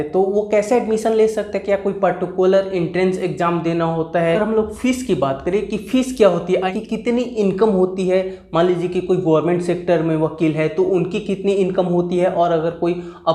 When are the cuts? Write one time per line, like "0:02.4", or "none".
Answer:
0:04.3
0:06.6